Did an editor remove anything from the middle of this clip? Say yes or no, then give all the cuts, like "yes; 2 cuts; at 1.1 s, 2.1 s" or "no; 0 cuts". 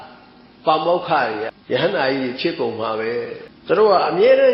yes; 2 cuts; at 1.5 s, 3.5 s